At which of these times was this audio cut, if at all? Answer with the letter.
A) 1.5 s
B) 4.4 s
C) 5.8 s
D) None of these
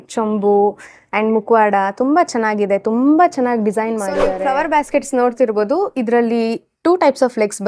B